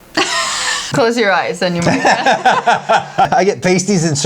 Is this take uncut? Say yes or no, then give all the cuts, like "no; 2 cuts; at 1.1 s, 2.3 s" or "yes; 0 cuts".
no; 2 cuts; at 0.9 s, 3.3 s